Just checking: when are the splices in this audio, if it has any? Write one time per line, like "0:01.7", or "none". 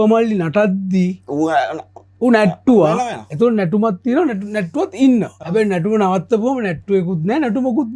0:05.4